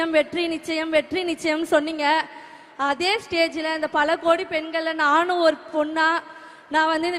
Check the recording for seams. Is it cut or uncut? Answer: uncut